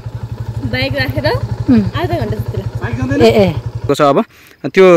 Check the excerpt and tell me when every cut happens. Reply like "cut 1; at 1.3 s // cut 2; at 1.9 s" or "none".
cut 1; at 3.9 s